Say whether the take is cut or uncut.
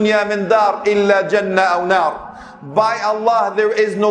uncut